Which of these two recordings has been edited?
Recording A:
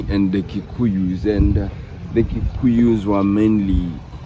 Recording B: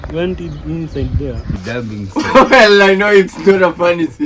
B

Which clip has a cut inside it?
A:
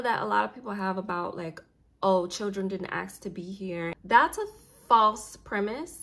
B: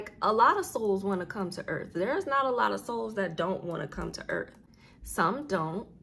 A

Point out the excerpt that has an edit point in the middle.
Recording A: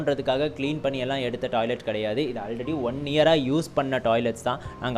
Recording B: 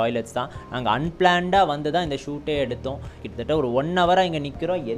B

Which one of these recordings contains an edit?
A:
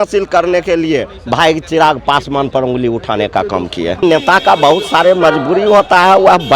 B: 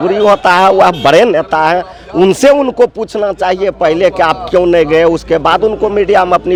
A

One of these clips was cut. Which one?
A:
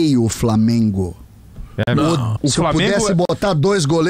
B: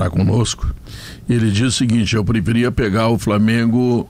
A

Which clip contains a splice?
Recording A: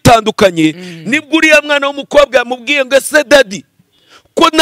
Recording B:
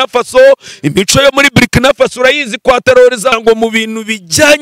B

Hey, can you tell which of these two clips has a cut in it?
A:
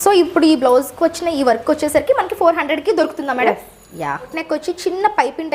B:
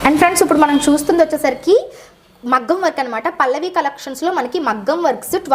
A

